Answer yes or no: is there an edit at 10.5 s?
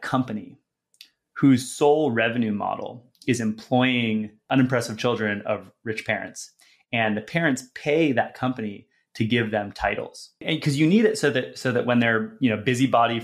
yes